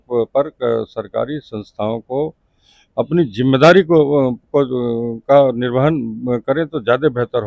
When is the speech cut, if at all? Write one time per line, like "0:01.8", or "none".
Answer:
none